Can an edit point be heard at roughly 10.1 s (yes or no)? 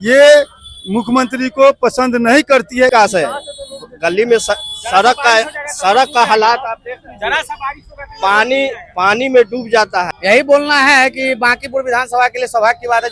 yes